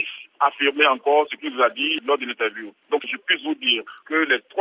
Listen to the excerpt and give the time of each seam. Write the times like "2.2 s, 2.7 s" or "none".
none